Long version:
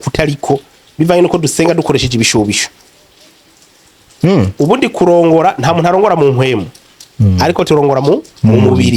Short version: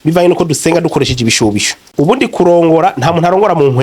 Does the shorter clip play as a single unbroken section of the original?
no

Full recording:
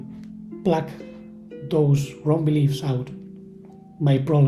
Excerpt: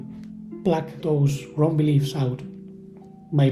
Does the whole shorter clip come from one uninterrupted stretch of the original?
no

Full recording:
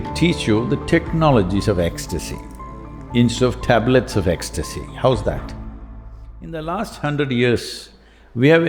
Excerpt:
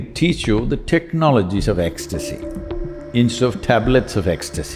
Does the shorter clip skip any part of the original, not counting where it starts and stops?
no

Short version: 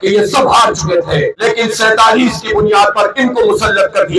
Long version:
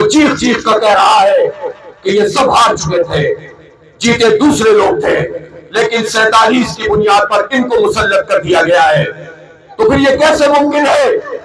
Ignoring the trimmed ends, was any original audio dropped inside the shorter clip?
yes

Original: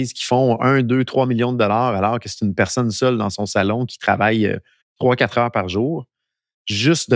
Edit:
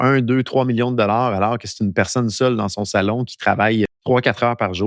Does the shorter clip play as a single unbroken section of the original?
no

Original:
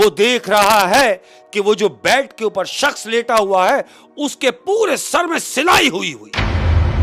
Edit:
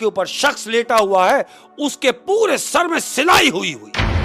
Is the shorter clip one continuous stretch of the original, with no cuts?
yes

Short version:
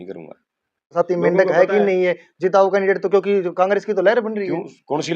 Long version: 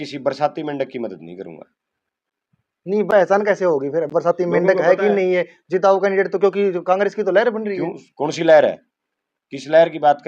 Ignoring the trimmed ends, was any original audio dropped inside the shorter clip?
yes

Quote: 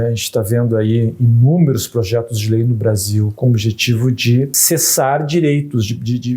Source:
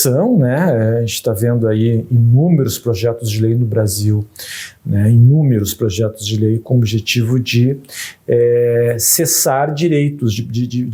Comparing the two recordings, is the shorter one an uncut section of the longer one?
no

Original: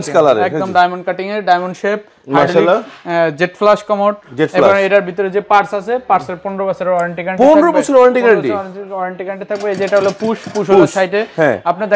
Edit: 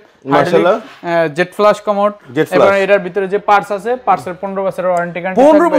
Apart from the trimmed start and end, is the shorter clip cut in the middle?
no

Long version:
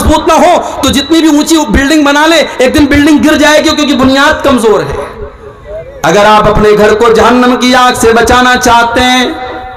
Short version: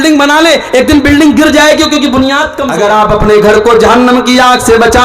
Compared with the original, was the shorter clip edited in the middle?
yes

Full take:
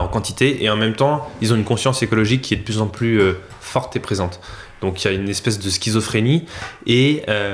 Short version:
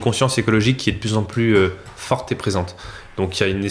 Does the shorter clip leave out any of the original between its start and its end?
no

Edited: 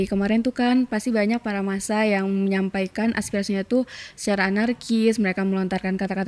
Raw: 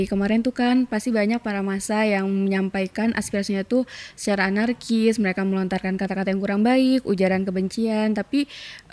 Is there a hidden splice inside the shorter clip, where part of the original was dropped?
no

